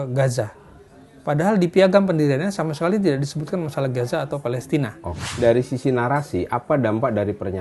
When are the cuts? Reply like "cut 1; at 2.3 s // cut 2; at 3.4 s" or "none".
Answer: cut 1; at 5.1 s